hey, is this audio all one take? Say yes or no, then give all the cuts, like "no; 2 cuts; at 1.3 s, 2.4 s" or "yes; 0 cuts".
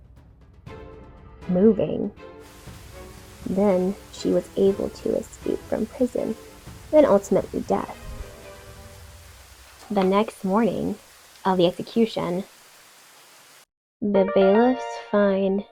yes; 0 cuts